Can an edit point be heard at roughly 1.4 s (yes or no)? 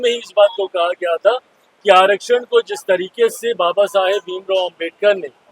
no